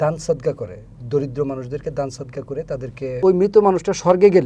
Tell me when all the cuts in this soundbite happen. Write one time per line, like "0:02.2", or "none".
0:03.2